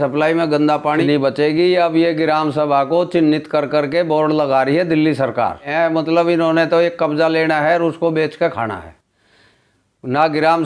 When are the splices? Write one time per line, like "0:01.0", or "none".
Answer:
0:01.0
0:05.7